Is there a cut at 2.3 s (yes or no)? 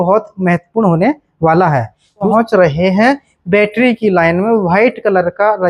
yes